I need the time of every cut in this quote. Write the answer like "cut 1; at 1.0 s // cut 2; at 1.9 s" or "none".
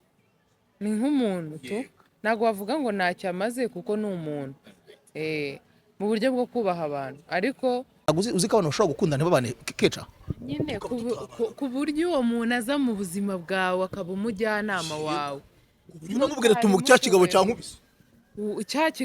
cut 1; at 7.9 s